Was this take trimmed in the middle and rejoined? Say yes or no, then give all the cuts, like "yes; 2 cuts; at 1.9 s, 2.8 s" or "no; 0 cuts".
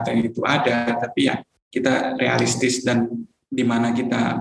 yes; 2 cuts; at 1.5 s, 3.3 s